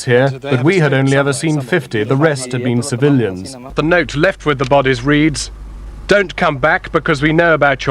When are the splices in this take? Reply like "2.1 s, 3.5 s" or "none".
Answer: 3.7 s